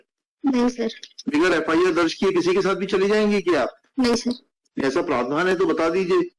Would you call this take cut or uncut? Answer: uncut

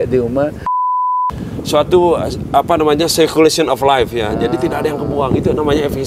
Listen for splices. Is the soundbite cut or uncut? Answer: cut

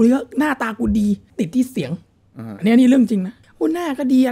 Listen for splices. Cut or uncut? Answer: cut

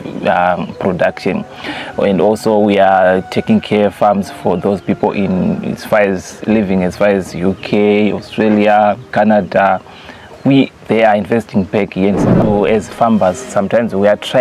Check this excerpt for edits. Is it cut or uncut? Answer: cut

